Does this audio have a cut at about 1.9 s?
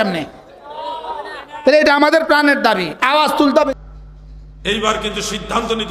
no; 1 cut; at 3.7 s

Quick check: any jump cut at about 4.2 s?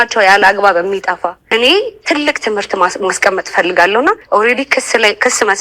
yes; 2 cuts; at 1.5 s, 4.2 s

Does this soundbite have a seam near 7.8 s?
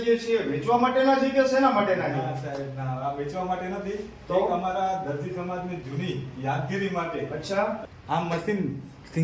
yes; 1 cut; at 7.8 s

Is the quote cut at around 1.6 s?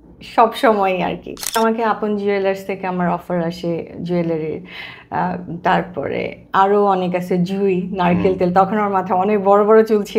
yes; 1 cut; at 1.6 s

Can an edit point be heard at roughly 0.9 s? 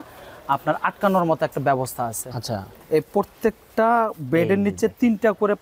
no; 1 cut; at 2.7 s

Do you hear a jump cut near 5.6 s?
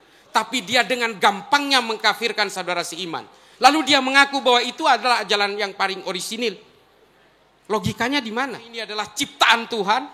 no; 1 cut; at 9.0 s

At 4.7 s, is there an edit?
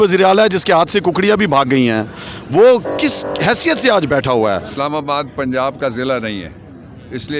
yes; 1 cut; at 4.7 s

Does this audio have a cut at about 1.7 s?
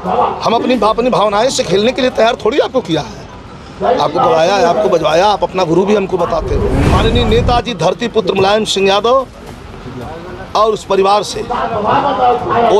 no; 1 cut; at 6.9 s

